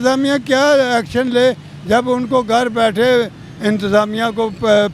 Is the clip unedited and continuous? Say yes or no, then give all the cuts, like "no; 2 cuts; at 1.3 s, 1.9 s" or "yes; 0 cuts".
yes; 0 cuts